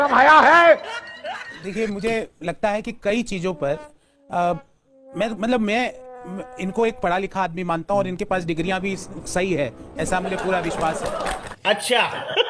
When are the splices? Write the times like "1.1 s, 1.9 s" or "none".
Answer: none